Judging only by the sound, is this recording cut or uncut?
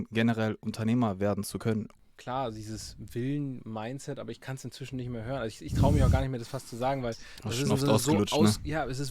cut